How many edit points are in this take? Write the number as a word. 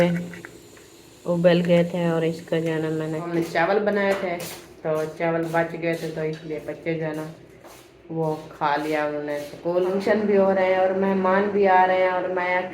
two